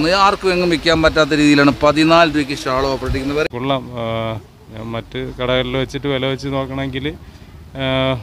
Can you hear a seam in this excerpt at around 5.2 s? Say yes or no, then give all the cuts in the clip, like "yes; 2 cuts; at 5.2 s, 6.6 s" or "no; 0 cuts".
no; 1 cut; at 3.5 s